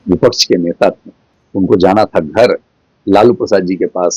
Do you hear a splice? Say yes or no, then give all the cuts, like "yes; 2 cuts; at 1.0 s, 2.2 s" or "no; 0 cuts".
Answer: no; 0 cuts